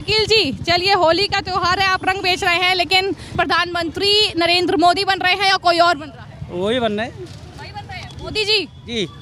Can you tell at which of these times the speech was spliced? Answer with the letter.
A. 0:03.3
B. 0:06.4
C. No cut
A